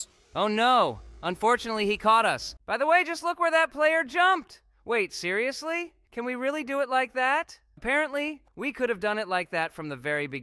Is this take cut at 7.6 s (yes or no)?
yes